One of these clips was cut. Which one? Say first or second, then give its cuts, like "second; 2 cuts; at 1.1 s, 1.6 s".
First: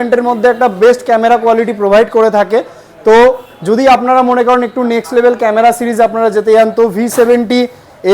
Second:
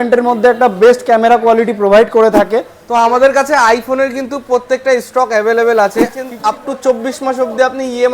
second; 2 cuts; at 2.8 s, 6.3 s